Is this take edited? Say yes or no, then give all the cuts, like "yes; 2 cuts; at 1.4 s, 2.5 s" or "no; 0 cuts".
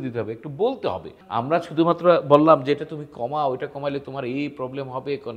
yes; 1 cut; at 1.2 s